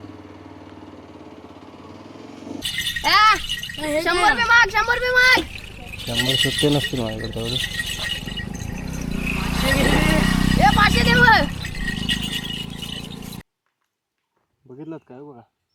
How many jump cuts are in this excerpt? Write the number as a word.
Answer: two